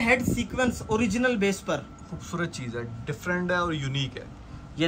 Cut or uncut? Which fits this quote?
uncut